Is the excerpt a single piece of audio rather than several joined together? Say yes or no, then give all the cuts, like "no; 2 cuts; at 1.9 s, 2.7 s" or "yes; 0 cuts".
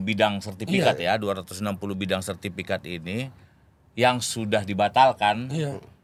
yes; 0 cuts